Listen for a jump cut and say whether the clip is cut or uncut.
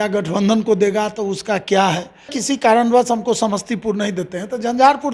cut